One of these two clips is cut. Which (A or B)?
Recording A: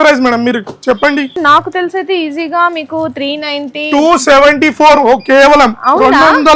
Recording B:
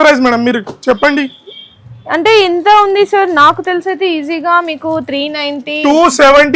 A